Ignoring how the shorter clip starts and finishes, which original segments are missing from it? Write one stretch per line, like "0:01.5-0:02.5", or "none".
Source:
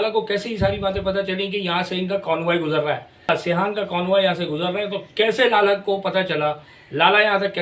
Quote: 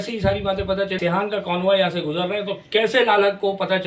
0:01.4-0:03.4